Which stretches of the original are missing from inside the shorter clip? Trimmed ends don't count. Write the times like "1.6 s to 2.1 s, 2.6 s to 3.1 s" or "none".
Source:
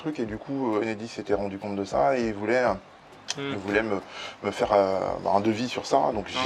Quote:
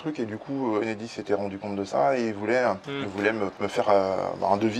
3.3 s to 4.2 s